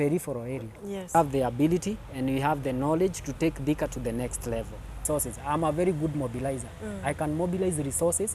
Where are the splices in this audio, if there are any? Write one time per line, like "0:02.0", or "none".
0:01.1
0:05.0

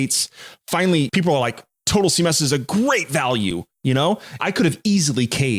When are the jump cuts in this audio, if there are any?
0:01.1
0:04.4

